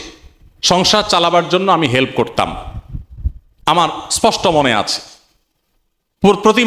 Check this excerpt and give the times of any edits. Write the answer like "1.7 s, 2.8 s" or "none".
none